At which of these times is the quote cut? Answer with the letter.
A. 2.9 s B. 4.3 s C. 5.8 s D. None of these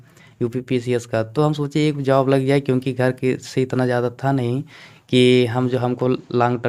D